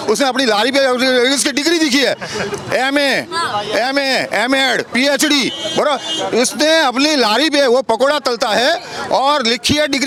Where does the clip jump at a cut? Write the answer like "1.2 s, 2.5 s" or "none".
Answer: none